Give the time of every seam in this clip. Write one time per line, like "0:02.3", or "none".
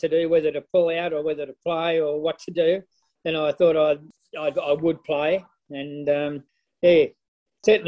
none

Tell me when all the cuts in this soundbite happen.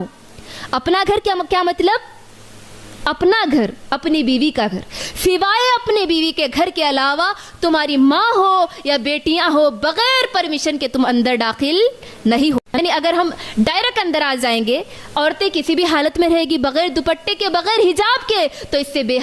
0:12.8

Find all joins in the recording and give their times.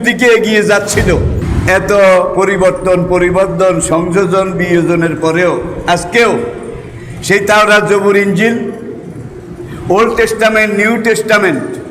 0:01.4

